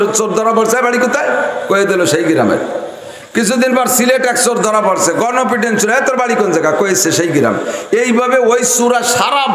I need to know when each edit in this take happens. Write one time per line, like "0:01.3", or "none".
none